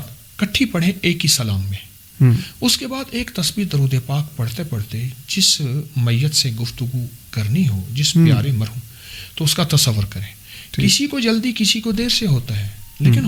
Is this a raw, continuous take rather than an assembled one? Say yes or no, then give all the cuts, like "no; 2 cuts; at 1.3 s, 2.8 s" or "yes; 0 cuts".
yes; 0 cuts